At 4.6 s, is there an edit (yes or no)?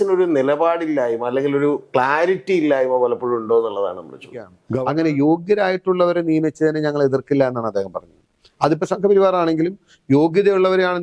yes